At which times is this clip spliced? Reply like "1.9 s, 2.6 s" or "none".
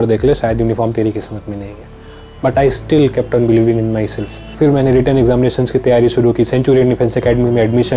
4.5 s